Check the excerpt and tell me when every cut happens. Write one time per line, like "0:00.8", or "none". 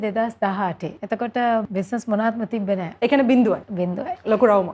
0:00.9
0:01.7
0:02.9
0:03.7